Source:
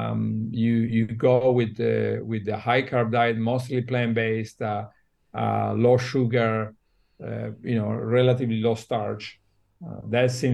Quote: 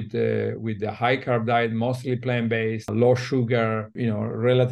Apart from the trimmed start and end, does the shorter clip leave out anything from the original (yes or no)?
yes